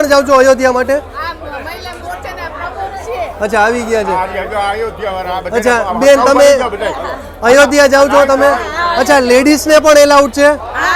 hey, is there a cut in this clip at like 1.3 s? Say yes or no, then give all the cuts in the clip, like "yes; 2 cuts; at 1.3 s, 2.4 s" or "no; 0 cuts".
no; 0 cuts